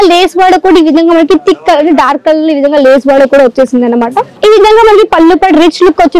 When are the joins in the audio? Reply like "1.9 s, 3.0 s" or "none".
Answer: 4.3 s

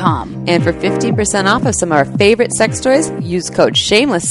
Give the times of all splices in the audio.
none

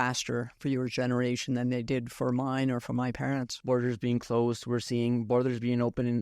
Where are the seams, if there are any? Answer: 3.5 s

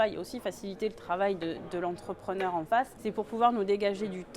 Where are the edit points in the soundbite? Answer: 3.0 s

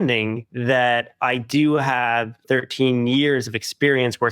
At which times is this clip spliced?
2.4 s

